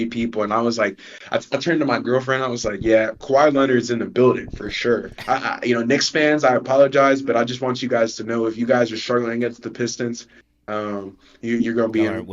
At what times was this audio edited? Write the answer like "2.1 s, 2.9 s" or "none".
5.1 s